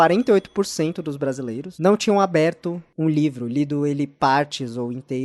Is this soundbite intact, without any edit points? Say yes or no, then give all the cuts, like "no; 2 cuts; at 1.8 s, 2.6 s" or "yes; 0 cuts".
no; 1 cut; at 1.6 s